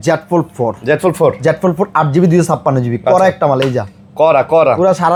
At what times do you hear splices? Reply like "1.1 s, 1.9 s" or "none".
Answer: none